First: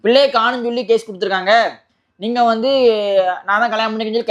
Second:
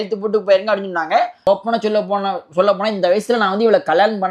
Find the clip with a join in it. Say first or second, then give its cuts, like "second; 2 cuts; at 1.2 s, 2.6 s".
second; 1 cut; at 1.5 s